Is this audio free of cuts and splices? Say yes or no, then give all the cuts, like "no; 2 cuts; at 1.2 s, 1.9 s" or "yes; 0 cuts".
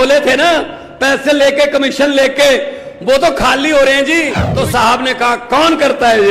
no; 1 cut; at 4.4 s